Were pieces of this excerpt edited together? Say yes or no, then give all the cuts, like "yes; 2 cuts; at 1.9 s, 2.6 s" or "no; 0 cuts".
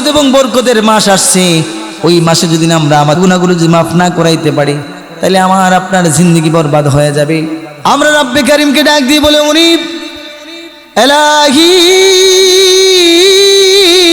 yes; 2 cuts; at 3.2 s, 7.7 s